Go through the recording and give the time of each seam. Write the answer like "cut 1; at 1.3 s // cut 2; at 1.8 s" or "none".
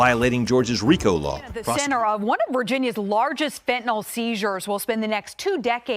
cut 1; at 1.5 s